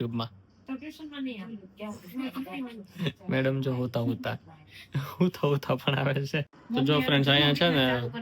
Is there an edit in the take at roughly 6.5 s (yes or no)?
yes